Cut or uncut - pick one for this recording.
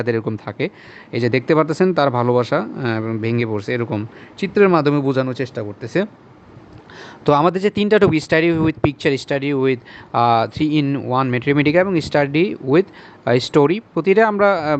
uncut